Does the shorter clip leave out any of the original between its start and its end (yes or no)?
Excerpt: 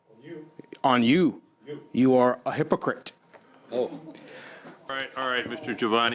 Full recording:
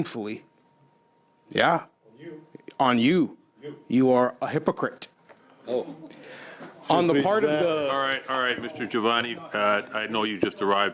yes